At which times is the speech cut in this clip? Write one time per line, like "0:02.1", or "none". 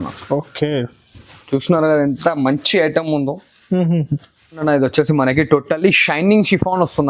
0:04.6

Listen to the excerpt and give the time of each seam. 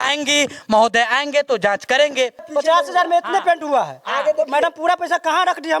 0:02.5

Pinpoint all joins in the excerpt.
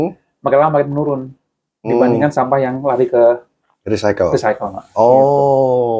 none

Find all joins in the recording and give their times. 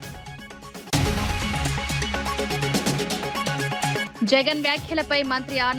0:00.9
0:02.2
0:03.6

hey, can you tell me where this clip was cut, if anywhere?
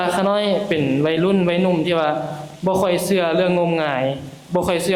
none

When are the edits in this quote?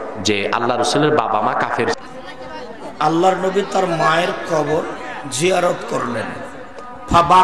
0:02.0

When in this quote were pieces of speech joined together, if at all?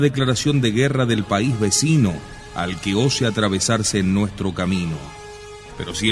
0:03.9

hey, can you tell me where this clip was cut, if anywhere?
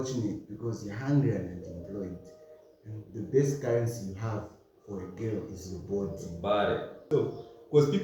0:07.1

